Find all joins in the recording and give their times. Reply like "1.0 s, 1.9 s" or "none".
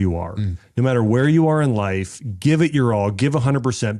none